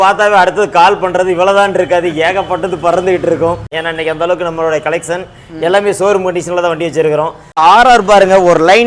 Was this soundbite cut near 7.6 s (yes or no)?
yes